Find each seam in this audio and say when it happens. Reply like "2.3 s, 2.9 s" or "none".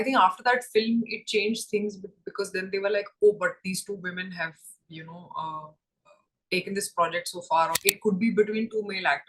7.8 s